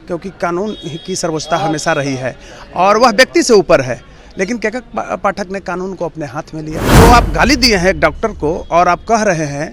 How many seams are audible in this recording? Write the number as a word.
one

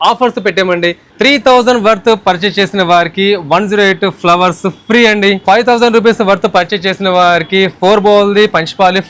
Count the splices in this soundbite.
two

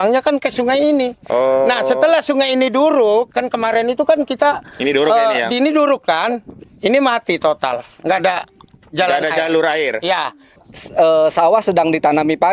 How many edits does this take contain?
one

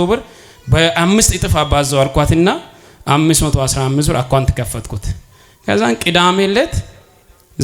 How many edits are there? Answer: zero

